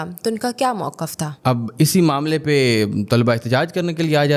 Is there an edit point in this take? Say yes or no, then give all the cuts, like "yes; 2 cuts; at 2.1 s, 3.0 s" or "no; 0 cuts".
no; 0 cuts